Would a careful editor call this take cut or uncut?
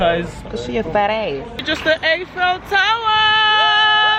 cut